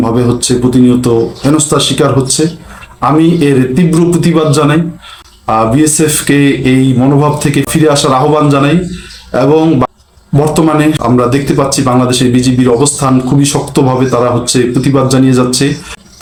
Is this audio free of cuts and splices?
yes; 0 cuts

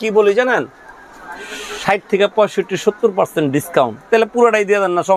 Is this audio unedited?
yes; 0 cuts

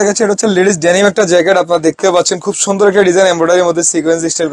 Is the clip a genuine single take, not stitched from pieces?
yes; 0 cuts

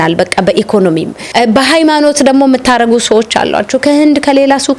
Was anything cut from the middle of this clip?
yes; 1 cut; at 1.2 s

